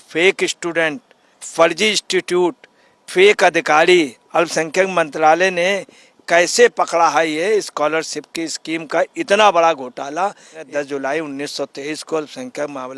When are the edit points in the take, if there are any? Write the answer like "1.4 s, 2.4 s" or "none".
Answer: 10.6 s